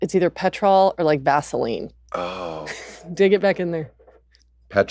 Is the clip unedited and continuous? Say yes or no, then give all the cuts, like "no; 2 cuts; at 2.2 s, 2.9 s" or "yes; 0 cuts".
yes; 0 cuts